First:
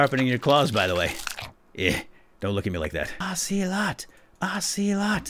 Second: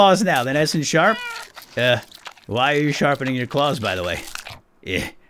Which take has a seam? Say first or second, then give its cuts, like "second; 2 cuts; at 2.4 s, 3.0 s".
first; 1 cut; at 3.2 s